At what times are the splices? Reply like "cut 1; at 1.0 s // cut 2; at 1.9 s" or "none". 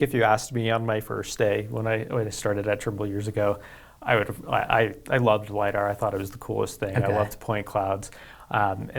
none